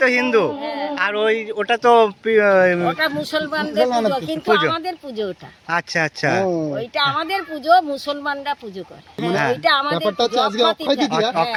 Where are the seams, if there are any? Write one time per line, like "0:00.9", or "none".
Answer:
none